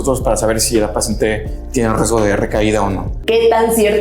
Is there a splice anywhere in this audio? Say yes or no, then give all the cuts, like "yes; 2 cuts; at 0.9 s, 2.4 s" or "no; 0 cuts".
yes; 1 cut; at 3.1 s